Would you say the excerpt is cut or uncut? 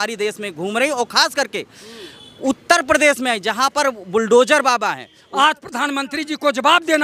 cut